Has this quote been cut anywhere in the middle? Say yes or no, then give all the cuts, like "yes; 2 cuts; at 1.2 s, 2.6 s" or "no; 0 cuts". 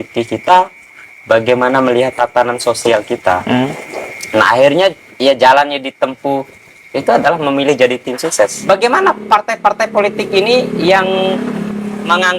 yes; 1 cut; at 8.6 s